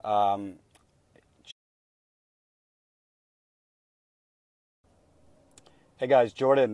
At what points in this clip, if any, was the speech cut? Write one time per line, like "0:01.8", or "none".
none